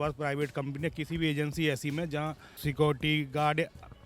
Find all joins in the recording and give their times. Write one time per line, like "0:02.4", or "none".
0:02.5